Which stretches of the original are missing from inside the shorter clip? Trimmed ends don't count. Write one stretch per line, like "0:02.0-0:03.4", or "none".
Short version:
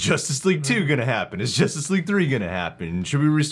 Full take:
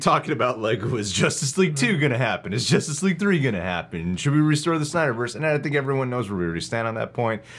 none